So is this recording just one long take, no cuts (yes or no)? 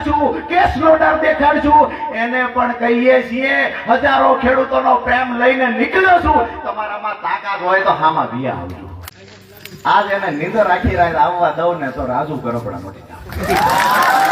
no